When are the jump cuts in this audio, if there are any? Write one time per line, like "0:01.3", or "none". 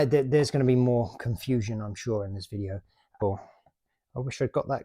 0:03.2